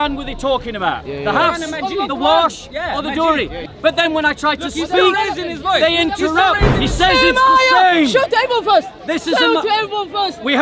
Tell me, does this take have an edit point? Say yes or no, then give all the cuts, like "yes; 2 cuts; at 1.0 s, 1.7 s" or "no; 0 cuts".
yes; 2 cuts; at 3.6 s, 6.7 s